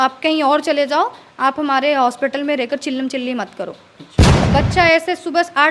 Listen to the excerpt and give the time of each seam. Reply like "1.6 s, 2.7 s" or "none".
4.3 s

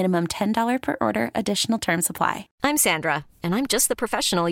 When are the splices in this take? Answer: 2.5 s

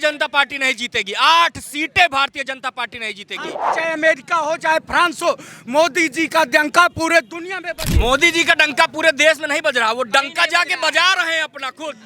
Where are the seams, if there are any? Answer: 3.7 s, 7.9 s

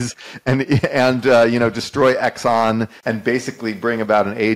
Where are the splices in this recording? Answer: 3.0 s

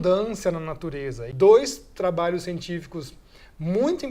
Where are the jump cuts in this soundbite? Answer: 1.2 s

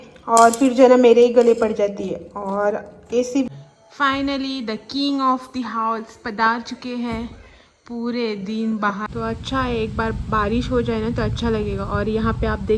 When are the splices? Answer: 3.5 s, 9.1 s

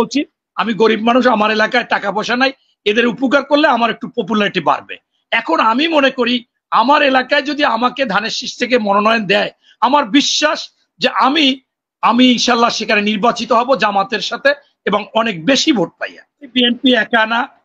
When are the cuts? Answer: 16.5 s

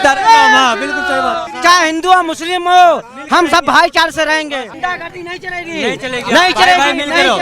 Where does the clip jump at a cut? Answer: 1.4 s, 4.7 s

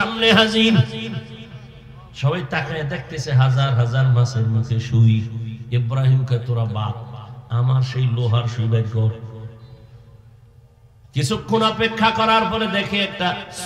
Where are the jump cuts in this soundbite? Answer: none

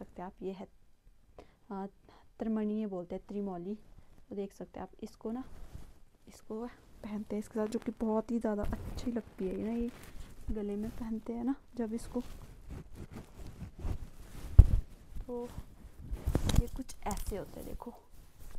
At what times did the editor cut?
none

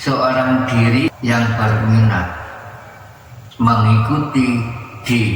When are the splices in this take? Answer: 1.1 s

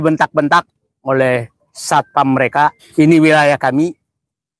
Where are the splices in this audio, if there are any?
2.8 s

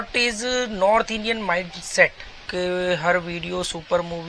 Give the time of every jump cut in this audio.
2.5 s

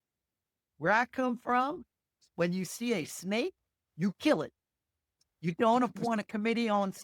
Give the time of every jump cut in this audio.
none

